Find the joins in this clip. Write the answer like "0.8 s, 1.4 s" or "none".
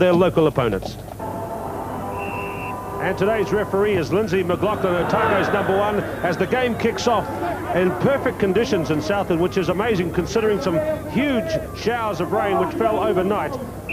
none